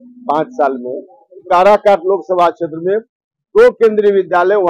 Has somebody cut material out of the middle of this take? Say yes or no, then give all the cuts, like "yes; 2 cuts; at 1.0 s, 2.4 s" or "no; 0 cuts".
yes; 1 cut; at 1.4 s